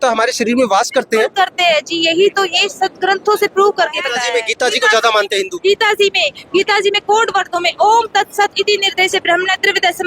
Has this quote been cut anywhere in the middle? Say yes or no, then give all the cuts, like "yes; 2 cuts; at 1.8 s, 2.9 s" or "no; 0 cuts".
yes; 1 cut; at 4.1 s